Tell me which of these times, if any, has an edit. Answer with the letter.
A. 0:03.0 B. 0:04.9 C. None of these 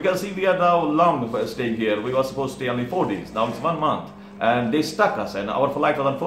C